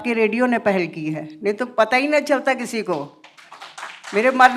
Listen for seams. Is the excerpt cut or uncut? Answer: uncut